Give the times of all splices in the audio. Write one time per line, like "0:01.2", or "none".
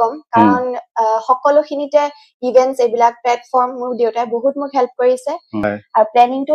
0:05.5